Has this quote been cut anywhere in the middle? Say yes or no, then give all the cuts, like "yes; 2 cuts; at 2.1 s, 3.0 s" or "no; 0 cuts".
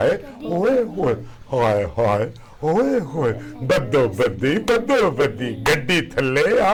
no; 0 cuts